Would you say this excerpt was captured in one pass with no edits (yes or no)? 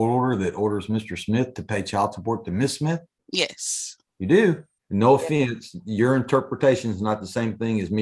no